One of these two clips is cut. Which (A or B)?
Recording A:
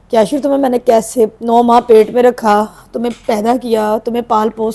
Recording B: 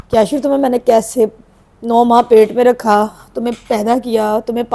A